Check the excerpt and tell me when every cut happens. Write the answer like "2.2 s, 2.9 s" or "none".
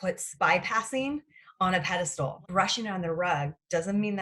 2.4 s